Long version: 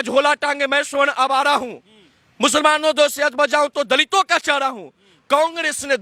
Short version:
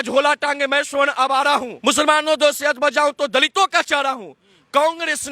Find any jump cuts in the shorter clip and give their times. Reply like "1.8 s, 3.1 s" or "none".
1.7 s